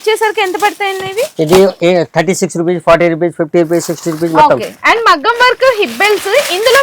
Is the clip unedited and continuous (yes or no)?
yes